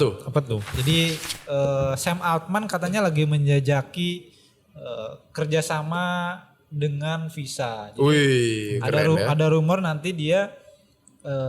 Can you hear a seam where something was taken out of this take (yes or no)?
yes